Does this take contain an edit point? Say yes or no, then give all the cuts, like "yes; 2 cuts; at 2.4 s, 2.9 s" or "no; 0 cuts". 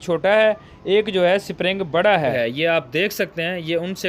yes; 1 cut; at 2.3 s